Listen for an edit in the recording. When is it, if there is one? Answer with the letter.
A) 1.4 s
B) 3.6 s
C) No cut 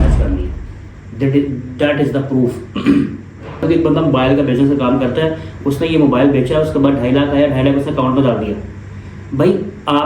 B